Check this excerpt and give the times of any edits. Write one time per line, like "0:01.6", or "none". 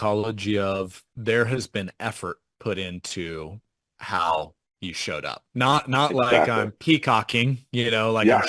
0:01.0